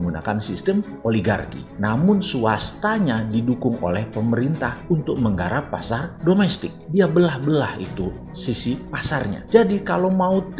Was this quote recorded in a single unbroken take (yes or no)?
yes